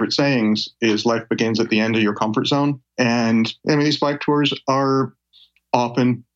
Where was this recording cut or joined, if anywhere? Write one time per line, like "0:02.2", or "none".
0:02.8
0:03.6